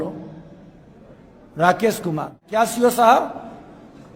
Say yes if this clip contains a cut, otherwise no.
yes